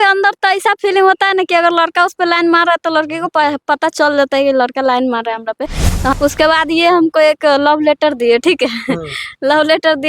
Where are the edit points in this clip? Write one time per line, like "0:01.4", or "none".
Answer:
0:06.1